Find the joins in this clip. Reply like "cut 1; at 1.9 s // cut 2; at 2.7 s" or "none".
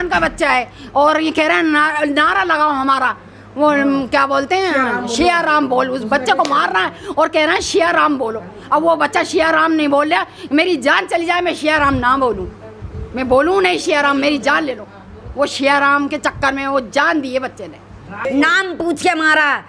cut 1; at 18.2 s